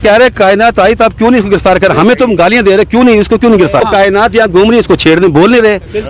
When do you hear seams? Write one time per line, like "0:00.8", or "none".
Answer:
0:03.8